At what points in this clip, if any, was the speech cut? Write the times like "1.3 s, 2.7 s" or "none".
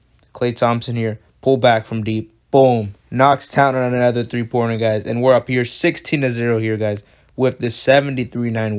none